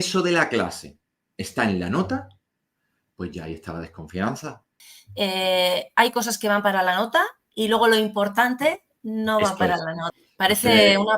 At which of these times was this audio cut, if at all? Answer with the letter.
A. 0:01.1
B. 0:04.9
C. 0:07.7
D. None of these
B